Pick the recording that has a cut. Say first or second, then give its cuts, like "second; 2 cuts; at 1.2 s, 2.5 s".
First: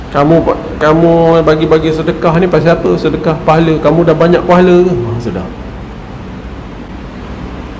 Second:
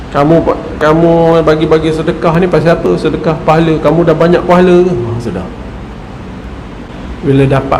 second; 1 cut; at 6.9 s